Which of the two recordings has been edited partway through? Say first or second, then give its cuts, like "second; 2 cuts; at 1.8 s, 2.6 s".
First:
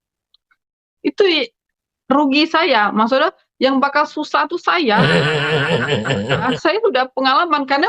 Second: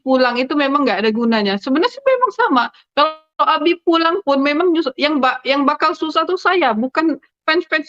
first; 2 cuts; at 5.1 s, 6.5 s